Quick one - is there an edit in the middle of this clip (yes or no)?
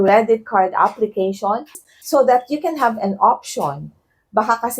yes